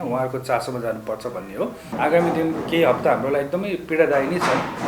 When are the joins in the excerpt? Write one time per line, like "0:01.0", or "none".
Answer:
0:01.9